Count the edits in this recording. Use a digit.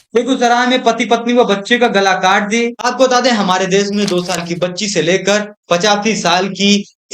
1